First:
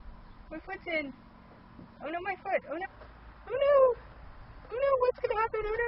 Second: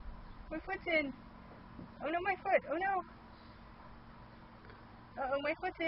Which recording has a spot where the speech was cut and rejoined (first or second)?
second